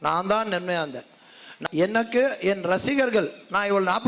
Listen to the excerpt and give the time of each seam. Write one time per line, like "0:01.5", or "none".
0:01.6